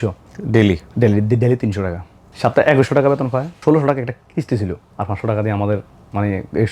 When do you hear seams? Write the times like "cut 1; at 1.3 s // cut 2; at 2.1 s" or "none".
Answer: none

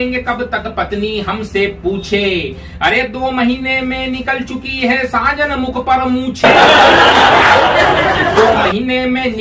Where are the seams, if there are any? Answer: none

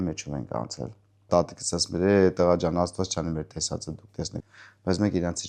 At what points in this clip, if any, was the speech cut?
cut 1; at 1.3 s // cut 2; at 4.4 s

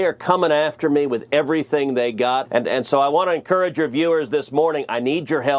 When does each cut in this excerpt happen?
cut 1; at 2.5 s

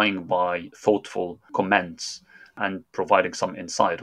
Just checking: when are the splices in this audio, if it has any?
cut 1; at 1.5 s // cut 2; at 2.6 s

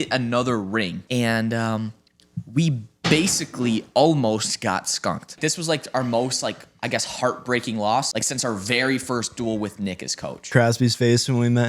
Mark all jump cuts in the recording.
cut 1; at 1.0 s // cut 2; at 5.4 s // cut 3; at 8.1 s // cut 4; at 10.5 s

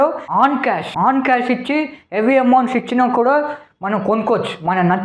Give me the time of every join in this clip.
none

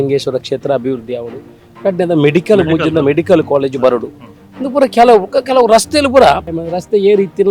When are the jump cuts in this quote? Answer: cut 1; at 6.6 s

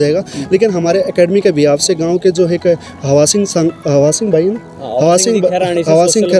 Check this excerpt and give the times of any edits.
none

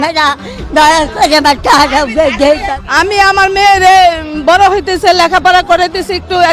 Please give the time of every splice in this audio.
cut 1; at 2.8 s

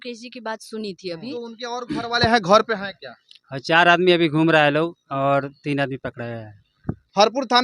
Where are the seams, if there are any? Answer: cut 1; at 1.3 s

